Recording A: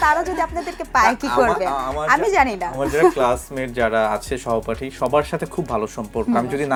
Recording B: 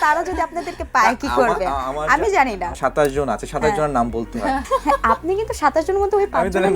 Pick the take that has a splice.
B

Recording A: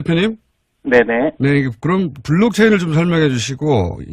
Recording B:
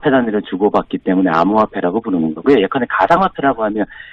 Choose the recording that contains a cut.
A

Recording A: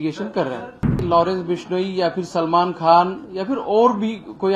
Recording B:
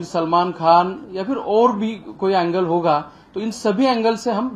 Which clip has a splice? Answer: A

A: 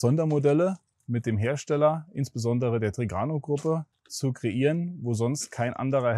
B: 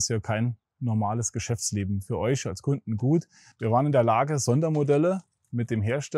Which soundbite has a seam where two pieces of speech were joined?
B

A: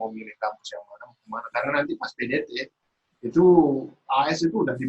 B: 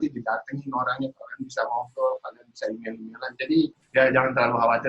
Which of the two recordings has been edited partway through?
B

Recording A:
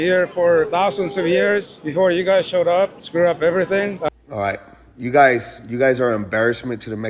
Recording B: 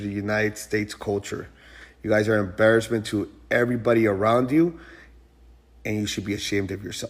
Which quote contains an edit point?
A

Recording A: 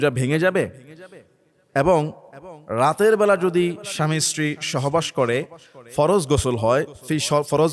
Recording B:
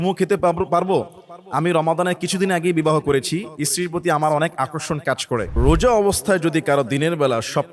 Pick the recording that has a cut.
B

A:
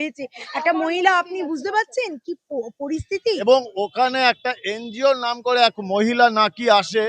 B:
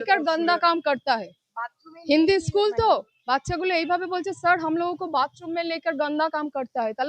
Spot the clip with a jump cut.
A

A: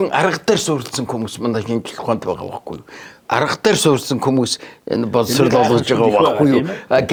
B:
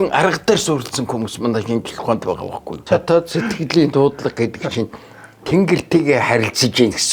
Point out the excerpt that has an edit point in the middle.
B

